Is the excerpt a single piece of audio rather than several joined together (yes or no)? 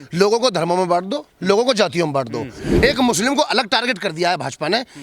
no